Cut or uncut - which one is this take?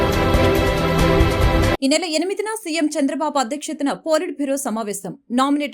cut